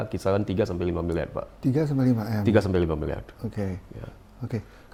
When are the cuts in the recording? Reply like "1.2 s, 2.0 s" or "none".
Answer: none